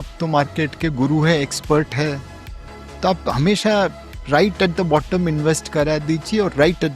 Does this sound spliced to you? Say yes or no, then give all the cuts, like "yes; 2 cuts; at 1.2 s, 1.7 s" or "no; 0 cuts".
no; 0 cuts